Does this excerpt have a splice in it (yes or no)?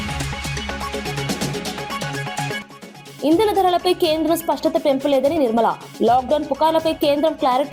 yes